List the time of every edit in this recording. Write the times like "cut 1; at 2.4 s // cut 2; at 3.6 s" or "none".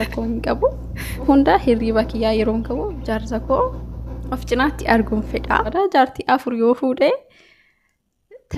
cut 1; at 1.3 s // cut 2; at 5.7 s